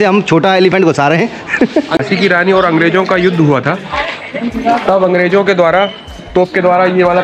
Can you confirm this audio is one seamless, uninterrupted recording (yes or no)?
no